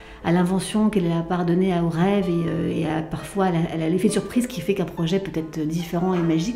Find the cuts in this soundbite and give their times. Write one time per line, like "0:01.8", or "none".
none

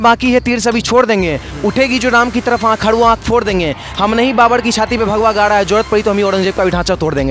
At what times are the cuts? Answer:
none

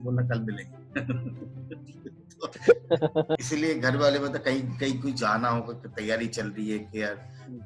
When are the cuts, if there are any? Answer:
0:03.4

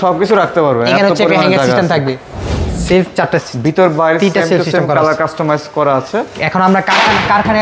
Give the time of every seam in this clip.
0:02.6

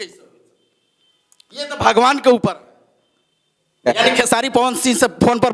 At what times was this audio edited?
0:03.9

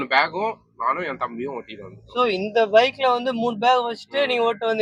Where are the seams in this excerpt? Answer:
none

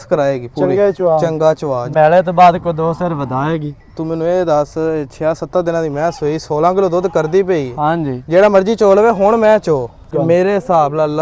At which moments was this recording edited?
0:01.9
0:10.1

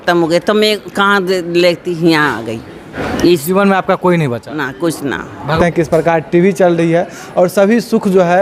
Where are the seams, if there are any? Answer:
0:03.0
0:05.6

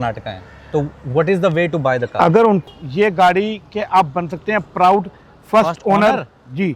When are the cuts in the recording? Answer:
0:02.6

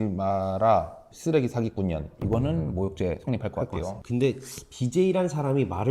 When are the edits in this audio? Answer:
0:04.0

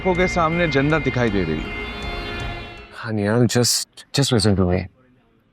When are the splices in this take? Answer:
0:02.6

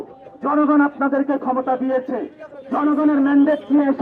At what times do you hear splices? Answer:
none

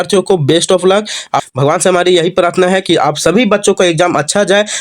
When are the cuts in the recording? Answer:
0:01.4

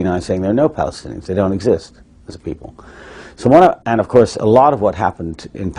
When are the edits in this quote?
0:03.6

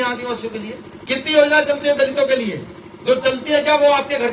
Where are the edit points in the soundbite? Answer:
0:00.9

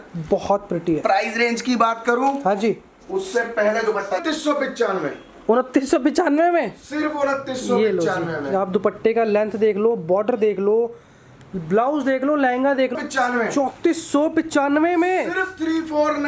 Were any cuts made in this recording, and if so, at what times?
0:04.2
0:13.0

